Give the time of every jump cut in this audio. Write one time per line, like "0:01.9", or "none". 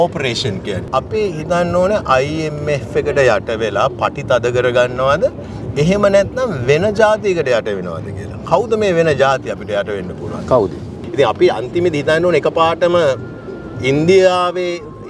0:00.8
0:11.0